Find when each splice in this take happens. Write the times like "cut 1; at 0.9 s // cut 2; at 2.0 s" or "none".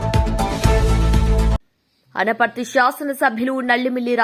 none